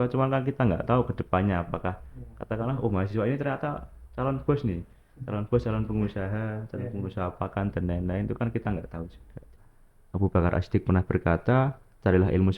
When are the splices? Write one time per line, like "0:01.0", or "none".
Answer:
0:09.6